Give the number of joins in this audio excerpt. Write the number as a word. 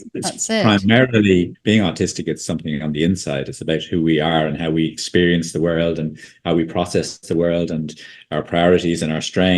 one